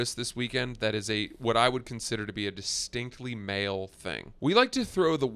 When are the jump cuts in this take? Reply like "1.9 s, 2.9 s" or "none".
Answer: 4.3 s